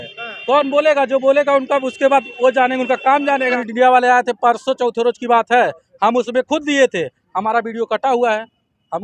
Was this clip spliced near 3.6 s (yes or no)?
yes